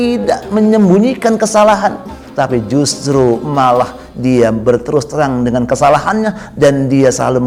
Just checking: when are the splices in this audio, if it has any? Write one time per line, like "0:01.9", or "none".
none